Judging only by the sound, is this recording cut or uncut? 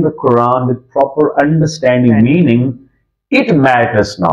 uncut